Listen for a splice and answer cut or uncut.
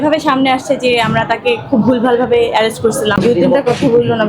cut